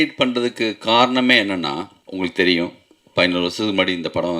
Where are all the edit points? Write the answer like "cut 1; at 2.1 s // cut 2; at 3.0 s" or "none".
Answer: cut 1; at 2.0 s